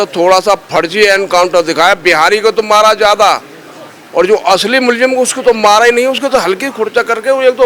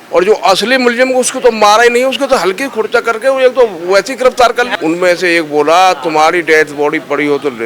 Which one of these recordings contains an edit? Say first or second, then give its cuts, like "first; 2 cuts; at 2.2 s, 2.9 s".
second; 1 cut; at 4.7 s